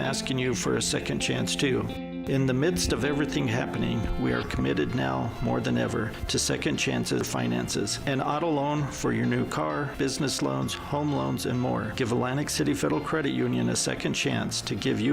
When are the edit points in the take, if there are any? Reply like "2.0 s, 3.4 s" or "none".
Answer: 7.3 s